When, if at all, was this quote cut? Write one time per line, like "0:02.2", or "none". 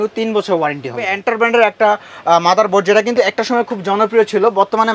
0:01.1

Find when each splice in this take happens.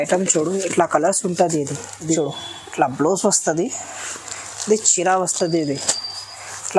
0:02.2

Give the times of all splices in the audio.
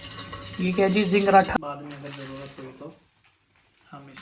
0:01.6

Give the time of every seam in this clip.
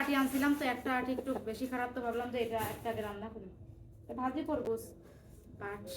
0:04.7

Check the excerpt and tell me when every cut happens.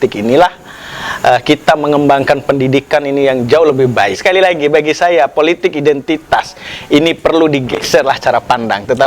0:04.2

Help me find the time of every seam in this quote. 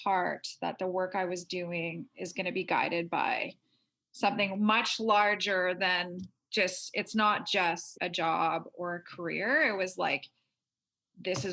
0:07.9

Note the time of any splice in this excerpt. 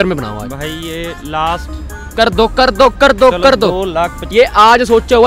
0:04.2

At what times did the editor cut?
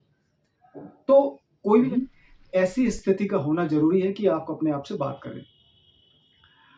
0:01.9

